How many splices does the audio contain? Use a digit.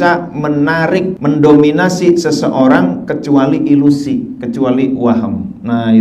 1